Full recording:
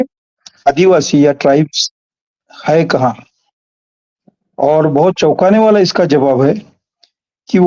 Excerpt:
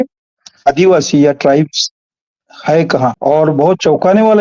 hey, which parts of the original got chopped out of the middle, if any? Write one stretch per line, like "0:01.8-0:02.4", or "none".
0:03.2-0:04.5